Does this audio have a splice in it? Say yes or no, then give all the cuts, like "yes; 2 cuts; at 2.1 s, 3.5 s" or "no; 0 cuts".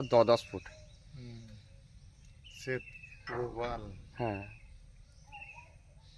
no; 0 cuts